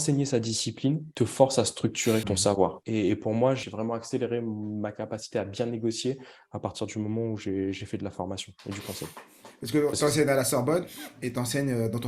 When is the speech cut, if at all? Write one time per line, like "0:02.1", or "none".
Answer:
0:01.1
0:02.6
0:03.6